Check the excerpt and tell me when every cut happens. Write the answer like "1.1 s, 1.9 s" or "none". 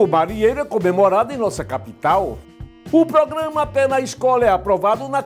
2.6 s